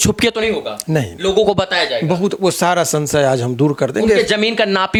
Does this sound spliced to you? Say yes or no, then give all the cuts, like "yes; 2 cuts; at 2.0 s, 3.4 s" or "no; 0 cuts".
no; 0 cuts